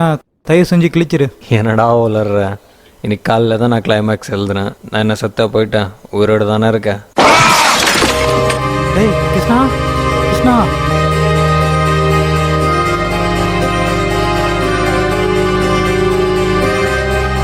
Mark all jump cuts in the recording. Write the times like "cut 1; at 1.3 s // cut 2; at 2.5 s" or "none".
cut 1; at 10.8 s